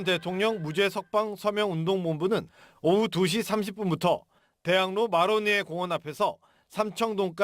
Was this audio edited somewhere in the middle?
yes; 1 cut; at 5.4 s

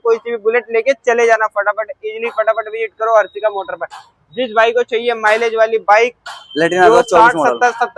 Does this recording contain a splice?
no; 0 cuts

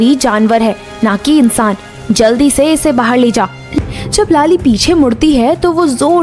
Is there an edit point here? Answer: yes; 1 cut; at 3.7 s

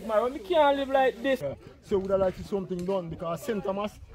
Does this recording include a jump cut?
yes; 1 cut; at 1.4 s

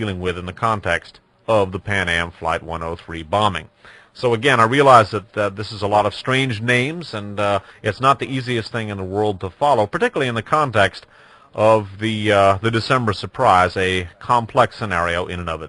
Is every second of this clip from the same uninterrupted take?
no; 1 cut; at 5.2 s

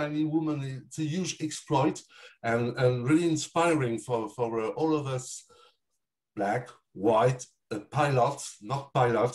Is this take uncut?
yes; 0 cuts

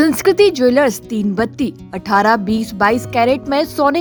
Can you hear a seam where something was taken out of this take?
no; 0 cuts

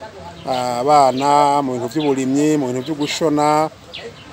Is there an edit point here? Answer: no; 0 cuts

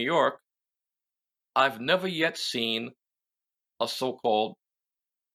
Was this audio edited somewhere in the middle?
no; 0 cuts

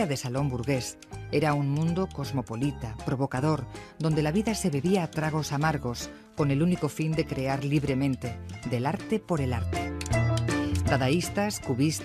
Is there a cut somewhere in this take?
no; 0 cuts

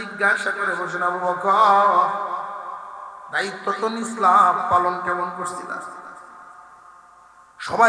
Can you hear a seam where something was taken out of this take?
no; 0 cuts

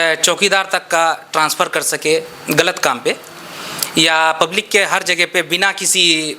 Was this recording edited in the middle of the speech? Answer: no; 0 cuts

